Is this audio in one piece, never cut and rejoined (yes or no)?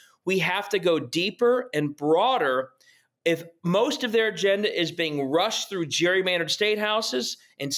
yes